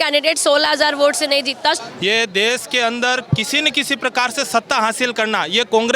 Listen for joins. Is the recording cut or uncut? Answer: cut